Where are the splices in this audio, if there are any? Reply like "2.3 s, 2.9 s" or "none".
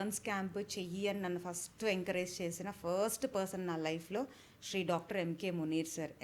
none